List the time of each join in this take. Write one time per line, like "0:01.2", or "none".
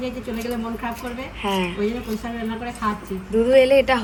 none

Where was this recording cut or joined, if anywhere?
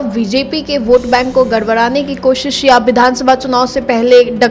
none

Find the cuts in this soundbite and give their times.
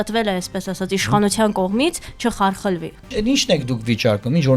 0:03.1

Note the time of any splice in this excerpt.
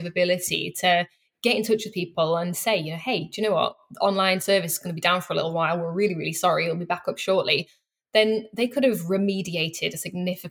none

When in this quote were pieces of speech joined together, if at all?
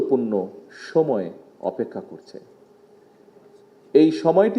none

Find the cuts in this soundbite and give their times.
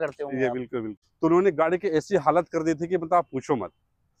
0:01.0

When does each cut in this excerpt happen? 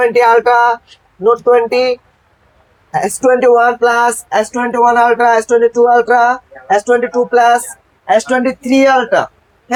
none

